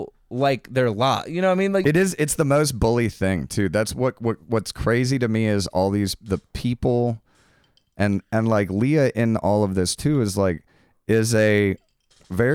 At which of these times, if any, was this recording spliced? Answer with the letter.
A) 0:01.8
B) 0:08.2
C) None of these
A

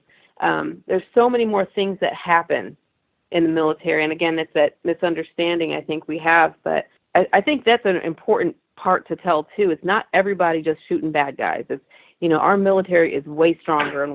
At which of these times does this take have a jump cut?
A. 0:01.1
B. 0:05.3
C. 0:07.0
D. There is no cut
C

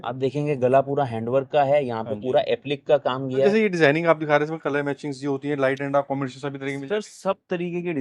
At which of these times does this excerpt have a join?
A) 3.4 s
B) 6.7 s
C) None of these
A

